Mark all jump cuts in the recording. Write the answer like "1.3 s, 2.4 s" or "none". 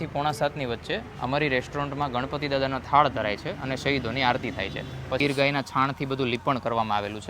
5.2 s